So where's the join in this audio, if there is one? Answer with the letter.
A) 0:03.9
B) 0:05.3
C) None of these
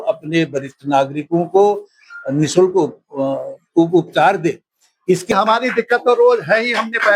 B